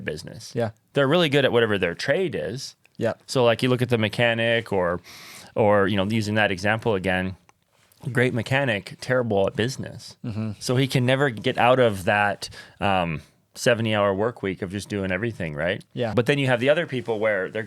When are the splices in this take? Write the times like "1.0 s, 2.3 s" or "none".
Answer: 11.4 s, 16.1 s